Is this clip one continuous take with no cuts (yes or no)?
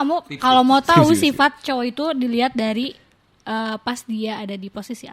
yes